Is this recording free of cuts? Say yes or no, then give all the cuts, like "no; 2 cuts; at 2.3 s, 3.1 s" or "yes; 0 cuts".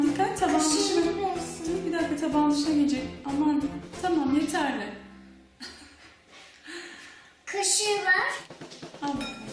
yes; 0 cuts